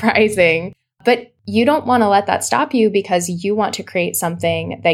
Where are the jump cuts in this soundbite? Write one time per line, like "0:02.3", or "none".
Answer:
0:01.1